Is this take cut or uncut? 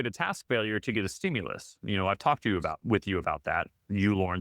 uncut